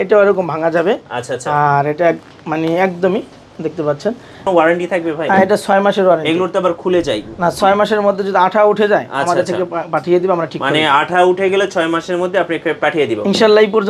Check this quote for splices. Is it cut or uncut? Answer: cut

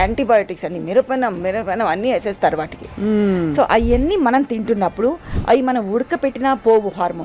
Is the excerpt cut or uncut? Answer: uncut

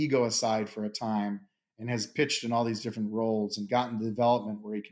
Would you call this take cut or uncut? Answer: uncut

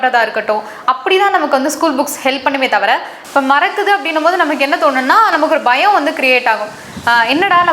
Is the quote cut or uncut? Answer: cut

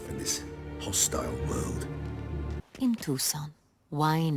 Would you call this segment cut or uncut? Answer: cut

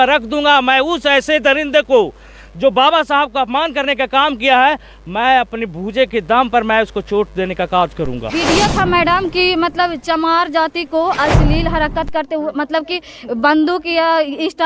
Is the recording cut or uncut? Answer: cut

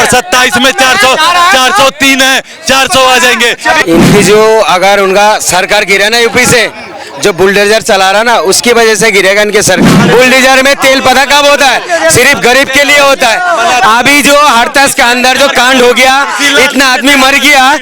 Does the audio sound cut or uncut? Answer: cut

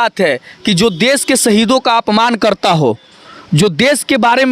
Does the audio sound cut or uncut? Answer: uncut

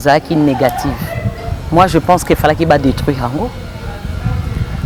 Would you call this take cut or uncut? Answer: uncut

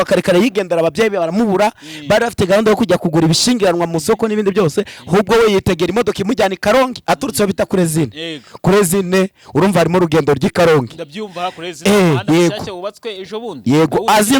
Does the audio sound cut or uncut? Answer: uncut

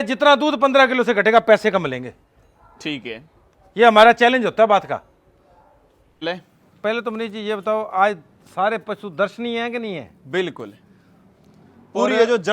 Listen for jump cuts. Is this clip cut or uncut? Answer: cut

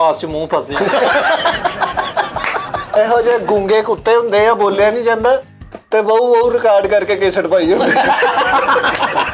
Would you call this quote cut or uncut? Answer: cut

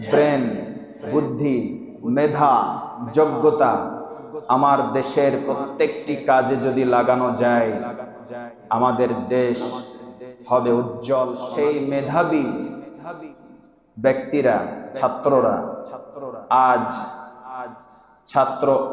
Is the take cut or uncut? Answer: cut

